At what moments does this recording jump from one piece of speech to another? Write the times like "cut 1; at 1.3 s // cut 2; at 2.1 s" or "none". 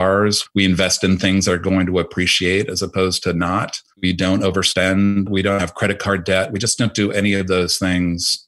cut 1; at 3.8 s

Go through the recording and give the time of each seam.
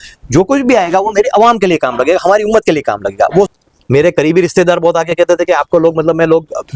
cut 1; at 3.5 s

